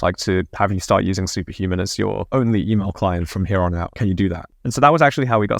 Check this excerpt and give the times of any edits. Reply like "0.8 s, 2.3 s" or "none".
4.1 s

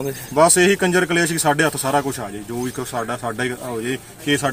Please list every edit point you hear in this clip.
none

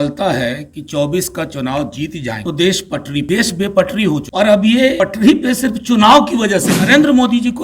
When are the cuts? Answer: 2.4 s, 3.3 s, 4.3 s, 5.0 s, 6.8 s

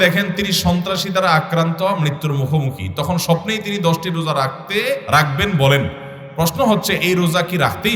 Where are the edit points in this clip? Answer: 5.0 s

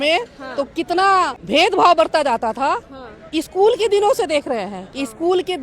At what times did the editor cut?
1.4 s

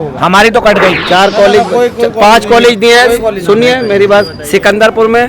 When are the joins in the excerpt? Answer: 1.0 s

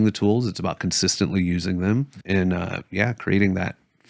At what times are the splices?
2.1 s

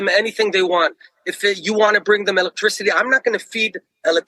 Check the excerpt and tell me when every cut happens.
2.8 s

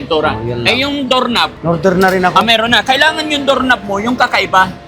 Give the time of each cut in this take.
1.6 s

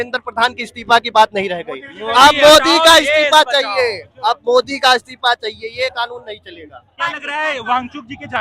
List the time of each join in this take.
6.9 s

